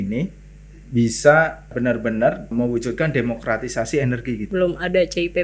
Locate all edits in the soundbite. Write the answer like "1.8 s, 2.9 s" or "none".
1.7 s, 2.5 s, 4.5 s